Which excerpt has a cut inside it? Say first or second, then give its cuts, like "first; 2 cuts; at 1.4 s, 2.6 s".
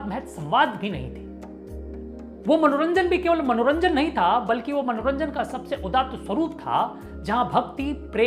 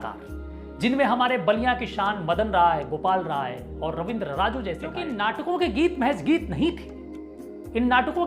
second; 1 cut; at 5.1 s